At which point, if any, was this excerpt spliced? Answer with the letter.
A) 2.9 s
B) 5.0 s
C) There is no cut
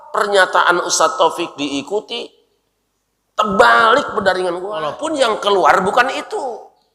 B